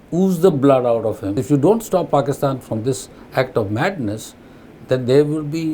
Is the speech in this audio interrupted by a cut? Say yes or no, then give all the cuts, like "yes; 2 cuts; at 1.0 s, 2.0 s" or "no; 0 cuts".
yes; 1 cut; at 1.4 s